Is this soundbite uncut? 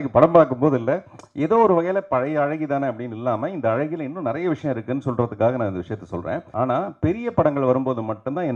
no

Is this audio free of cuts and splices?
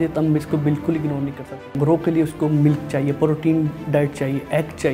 no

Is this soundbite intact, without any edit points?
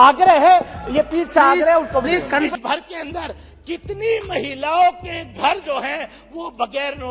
no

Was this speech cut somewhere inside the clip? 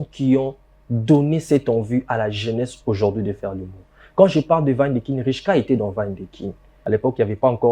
yes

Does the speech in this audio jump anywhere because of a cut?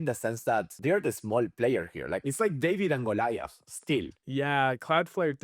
yes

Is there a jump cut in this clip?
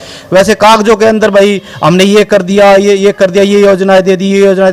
no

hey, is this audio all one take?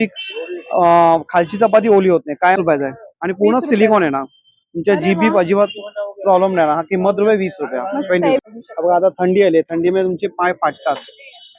no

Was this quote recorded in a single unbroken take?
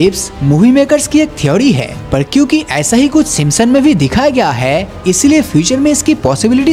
yes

